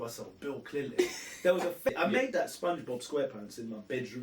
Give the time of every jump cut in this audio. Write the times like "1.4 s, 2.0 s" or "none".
1.9 s